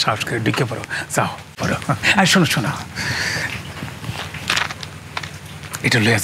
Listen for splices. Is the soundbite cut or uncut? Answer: cut